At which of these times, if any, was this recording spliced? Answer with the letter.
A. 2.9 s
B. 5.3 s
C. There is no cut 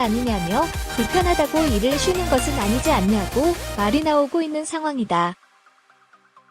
B